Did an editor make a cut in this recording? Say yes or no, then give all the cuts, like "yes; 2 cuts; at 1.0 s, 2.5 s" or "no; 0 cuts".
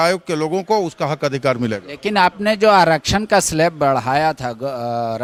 no; 0 cuts